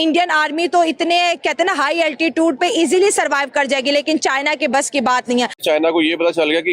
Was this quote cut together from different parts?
yes; 1 cut; at 5.6 s

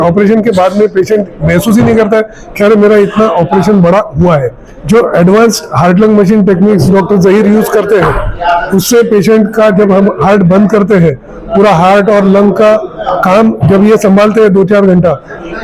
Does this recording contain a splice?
yes; 1 cut; at 4.7 s

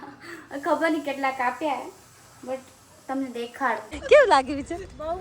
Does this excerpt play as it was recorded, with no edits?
no; 1 cut; at 3.9 s

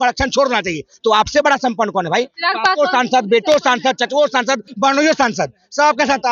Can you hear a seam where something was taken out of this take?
yes; 1 cut; at 4.7 s

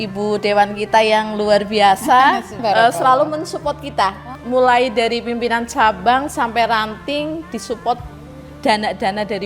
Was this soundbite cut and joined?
yes; 2 cuts; at 2.6 s, 4.4 s

